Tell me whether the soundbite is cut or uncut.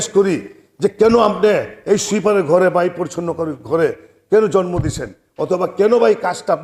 uncut